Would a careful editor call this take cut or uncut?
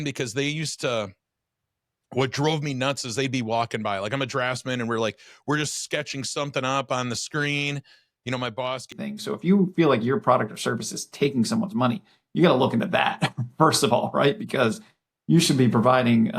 cut